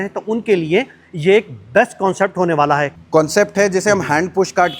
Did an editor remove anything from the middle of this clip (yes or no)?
yes